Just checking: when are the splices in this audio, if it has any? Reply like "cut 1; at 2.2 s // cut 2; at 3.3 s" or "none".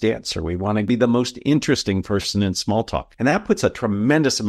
cut 1; at 0.9 s // cut 2; at 3.1 s

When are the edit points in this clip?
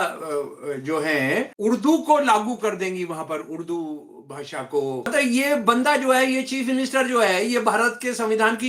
cut 1; at 1.5 s // cut 2; at 5.1 s

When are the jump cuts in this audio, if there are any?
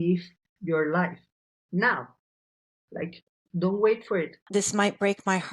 cut 1; at 4.4 s

